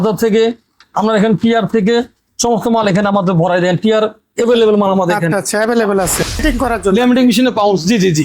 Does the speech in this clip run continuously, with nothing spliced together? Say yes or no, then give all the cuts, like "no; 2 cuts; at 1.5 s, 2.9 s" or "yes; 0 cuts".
no; 1 cut; at 6.3 s